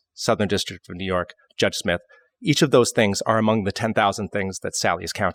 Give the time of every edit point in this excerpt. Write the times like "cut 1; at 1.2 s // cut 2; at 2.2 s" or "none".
none